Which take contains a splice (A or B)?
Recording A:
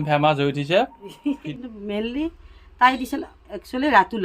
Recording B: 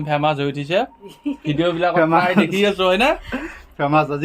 A